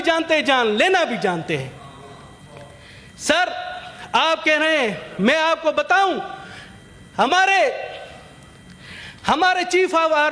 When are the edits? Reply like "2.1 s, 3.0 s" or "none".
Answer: none